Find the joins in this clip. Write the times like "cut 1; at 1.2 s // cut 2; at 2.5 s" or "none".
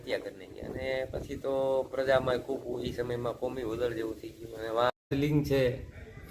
cut 1; at 5.1 s